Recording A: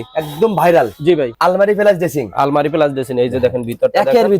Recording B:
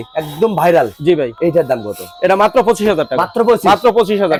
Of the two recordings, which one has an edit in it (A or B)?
A